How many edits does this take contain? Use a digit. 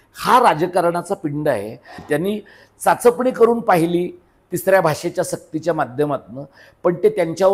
1